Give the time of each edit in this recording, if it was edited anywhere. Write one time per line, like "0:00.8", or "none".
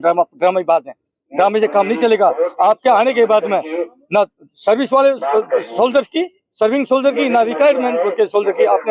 none